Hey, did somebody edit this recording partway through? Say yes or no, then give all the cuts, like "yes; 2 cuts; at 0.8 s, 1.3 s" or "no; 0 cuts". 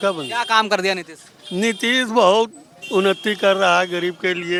no; 0 cuts